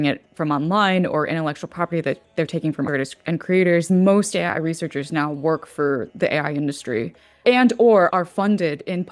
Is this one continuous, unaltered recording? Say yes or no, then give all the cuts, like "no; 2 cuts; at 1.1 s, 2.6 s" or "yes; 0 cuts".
no; 4 cuts; at 2.9 s, 3.9 s, 7.4 s, 8.1 s